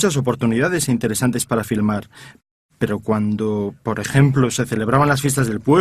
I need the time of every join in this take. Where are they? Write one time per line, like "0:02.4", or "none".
0:04.6